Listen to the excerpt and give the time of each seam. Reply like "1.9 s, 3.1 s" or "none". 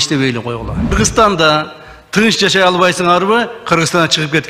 0.9 s